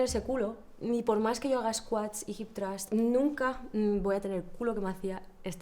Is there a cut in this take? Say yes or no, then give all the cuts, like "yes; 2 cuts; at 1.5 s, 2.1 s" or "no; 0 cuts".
yes; 1 cut; at 2.8 s